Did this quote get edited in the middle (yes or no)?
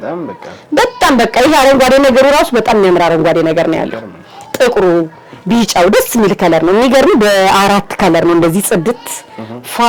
no